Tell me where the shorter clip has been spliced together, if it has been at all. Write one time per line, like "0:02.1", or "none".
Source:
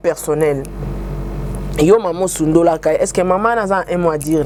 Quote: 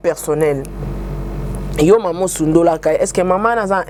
none